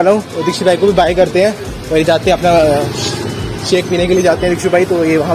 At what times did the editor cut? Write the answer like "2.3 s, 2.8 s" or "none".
none